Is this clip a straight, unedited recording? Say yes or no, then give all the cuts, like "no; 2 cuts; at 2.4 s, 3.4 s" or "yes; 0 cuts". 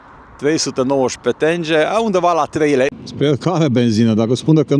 no; 1 cut; at 2.9 s